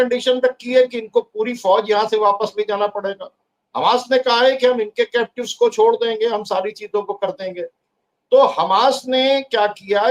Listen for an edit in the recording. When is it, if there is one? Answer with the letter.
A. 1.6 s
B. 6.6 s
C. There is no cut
C